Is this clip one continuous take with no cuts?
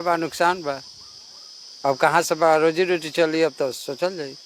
yes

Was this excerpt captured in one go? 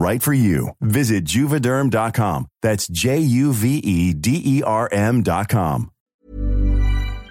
no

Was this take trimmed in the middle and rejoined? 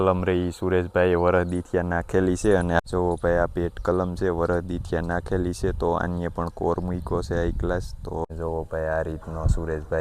yes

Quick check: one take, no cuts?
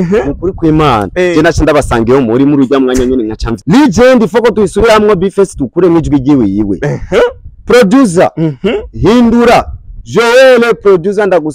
no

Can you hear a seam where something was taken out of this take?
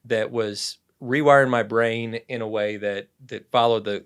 no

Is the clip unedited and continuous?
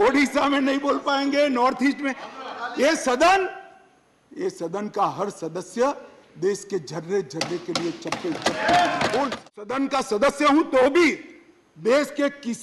no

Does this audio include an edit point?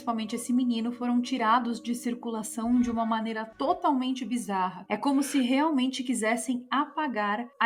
no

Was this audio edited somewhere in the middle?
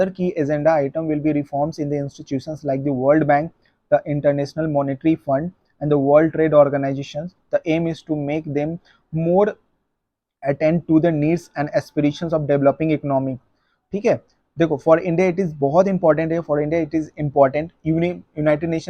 no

